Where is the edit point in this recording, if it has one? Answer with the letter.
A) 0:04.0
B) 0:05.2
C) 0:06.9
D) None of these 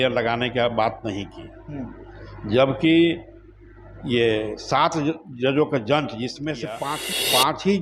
C